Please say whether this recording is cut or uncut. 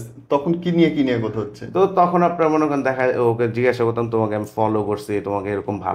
uncut